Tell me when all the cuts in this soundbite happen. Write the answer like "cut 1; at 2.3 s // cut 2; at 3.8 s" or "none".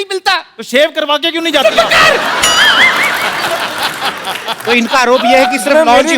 none

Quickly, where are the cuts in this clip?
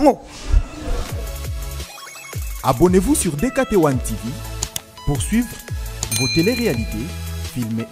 cut 1; at 1.1 s

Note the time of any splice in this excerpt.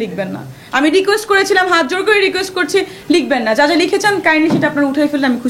none

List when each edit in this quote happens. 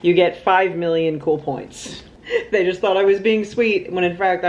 cut 1; at 2.1 s

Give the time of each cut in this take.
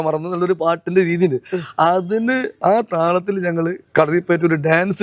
none

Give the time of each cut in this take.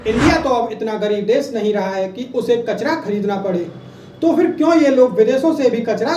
none

